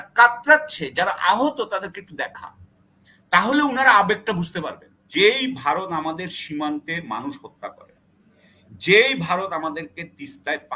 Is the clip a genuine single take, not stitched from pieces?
no; 1 cut; at 5.1 s

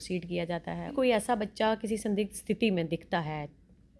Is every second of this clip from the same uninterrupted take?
no; 1 cut; at 0.9 s

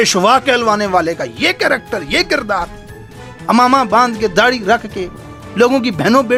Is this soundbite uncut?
yes; 0 cuts

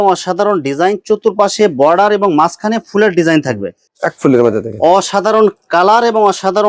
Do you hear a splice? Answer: yes; 1 cut; at 3.8 s

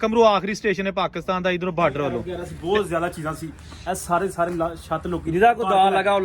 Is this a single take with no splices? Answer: no; 1 cut; at 2.2 s

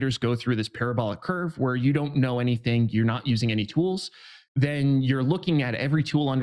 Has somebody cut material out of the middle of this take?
no; 0 cuts

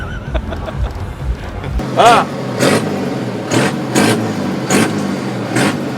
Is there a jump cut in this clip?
yes; 1 cut; at 1.8 s

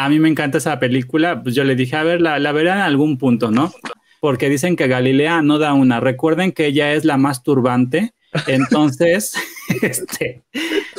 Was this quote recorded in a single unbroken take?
no; 1 cut; at 4.0 s

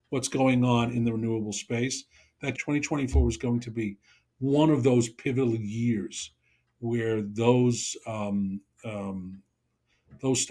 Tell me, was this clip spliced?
no; 0 cuts

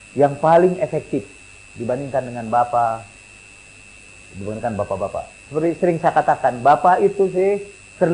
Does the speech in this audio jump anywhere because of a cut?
no; 0 cuts

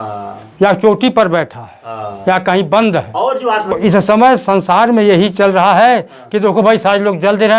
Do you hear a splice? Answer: yes; 1 cut; at 3.7 s

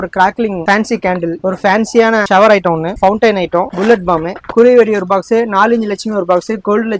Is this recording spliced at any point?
no; 0 cuts

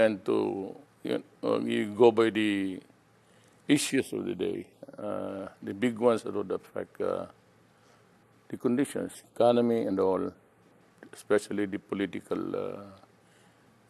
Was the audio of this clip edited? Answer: no; 0 cuts

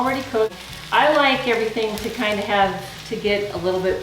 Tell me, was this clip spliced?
no; 0 cuts

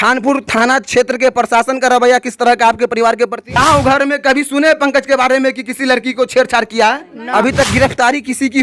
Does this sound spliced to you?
yes; 2 cuts; at 3.6 s, 7.1 s

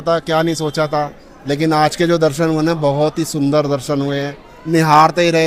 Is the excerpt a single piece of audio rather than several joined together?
yes; 0 cuts

